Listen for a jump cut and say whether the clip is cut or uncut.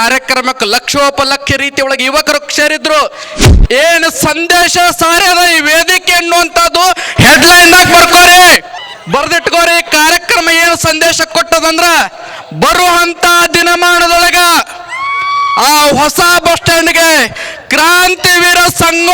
cut